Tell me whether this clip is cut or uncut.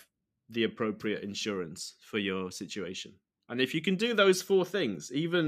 uncut